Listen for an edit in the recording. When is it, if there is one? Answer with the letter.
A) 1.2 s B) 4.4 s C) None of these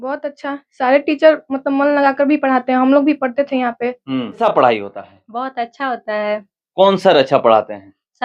B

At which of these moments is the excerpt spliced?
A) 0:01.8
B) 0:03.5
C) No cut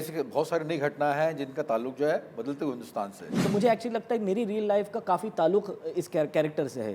B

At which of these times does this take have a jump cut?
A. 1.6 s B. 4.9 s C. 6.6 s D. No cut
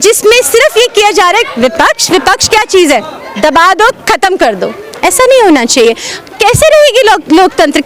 D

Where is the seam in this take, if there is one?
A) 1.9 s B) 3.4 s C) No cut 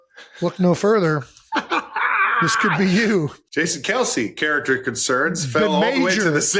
B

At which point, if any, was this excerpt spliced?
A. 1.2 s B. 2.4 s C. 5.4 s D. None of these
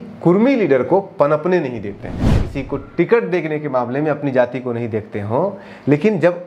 B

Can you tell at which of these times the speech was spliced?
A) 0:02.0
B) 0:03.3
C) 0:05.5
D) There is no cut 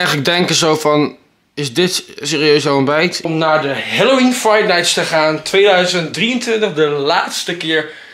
B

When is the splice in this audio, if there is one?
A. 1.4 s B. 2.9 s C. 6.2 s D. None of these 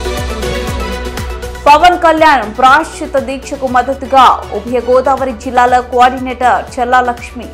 A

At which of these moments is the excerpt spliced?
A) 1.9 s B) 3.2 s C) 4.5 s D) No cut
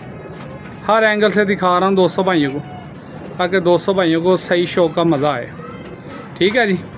D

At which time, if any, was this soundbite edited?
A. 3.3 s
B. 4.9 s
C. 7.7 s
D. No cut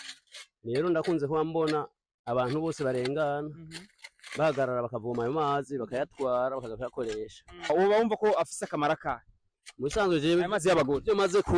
C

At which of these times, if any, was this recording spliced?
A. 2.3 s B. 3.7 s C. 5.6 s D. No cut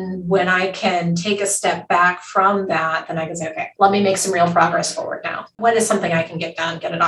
C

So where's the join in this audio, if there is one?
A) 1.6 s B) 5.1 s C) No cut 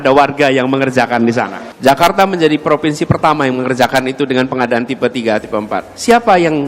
A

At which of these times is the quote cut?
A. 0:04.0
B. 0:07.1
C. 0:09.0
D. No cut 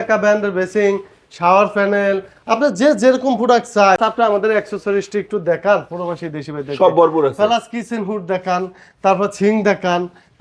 A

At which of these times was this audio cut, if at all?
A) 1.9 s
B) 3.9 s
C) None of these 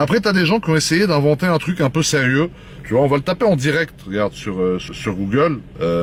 C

